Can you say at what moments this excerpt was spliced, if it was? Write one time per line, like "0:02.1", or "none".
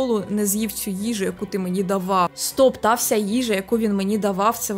0:02.4